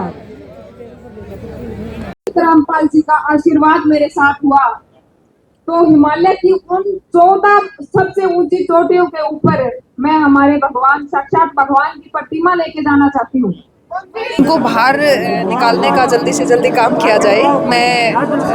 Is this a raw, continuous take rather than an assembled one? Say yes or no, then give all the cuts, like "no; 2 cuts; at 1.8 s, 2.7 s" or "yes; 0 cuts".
no; 1 cut; at 14.4 s